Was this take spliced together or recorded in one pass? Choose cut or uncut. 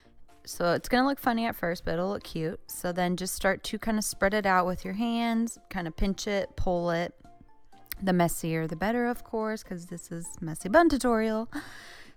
uncut